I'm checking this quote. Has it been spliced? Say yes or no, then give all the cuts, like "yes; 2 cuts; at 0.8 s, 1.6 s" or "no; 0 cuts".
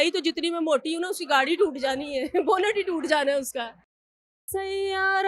yes; 1 cut; at 4.0 s